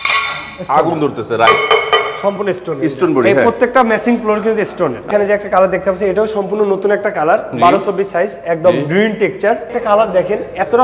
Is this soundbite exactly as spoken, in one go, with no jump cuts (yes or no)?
no